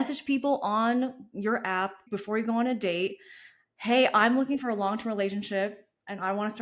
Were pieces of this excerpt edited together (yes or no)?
yes